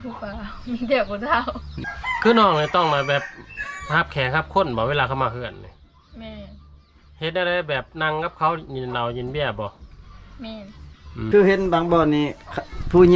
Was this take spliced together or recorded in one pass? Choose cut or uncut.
cut